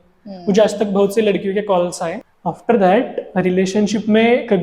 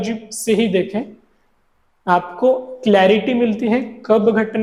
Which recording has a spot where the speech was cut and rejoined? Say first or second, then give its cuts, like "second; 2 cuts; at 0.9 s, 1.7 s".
first; 1 cut; at 2.3 s